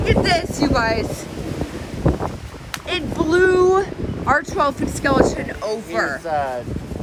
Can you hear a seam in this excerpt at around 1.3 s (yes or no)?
no